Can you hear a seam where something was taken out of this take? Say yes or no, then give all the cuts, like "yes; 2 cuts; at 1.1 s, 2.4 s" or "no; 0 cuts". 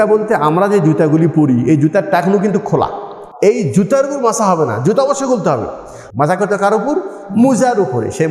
yes; 2 cuts; at 3.2 s, 6.0 s